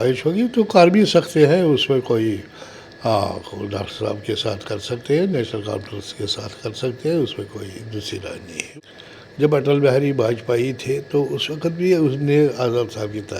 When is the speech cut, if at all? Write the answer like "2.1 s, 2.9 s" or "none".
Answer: 8.7 s